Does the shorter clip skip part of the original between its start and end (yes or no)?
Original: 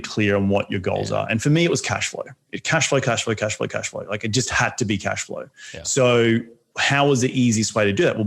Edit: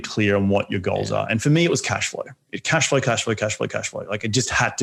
no